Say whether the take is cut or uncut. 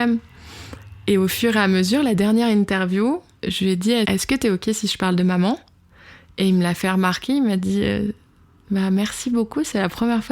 cut